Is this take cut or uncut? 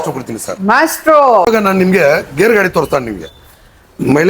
cut